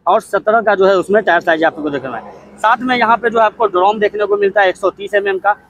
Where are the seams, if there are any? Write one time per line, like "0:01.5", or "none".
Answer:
none